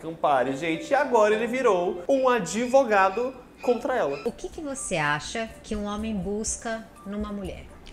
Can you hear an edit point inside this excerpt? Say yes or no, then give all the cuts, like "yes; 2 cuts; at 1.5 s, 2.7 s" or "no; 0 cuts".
yes; 1 cut; at 4.2 s